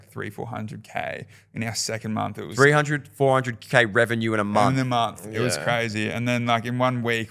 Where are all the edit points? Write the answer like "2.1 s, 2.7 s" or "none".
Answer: none